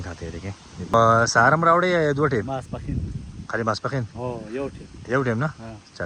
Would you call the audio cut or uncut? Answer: cut